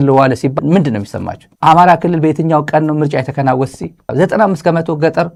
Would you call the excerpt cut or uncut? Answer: uncut